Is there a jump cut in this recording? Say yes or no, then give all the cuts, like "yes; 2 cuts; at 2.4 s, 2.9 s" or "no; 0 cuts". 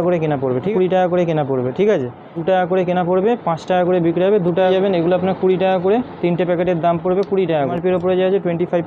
yes; 4 cuts; at 0.7 s, 2.4 s, 4.7 s, 7.7 s